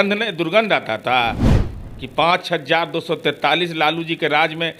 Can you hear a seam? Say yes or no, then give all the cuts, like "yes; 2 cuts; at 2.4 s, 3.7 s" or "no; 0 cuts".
no; 0 cuts